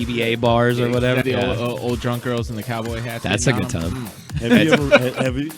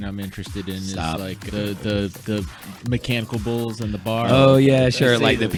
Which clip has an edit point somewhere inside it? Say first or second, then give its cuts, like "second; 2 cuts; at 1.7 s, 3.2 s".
first; 2 cuts; at 1.2 s, 4.2 s